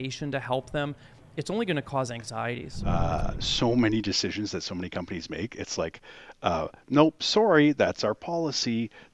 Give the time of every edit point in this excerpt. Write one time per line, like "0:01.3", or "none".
0:02.8